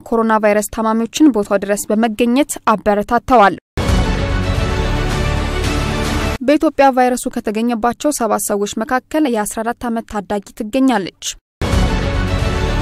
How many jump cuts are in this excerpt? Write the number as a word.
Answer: three